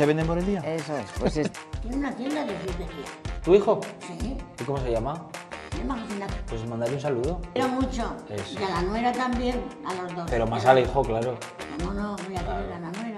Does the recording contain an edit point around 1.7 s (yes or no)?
yes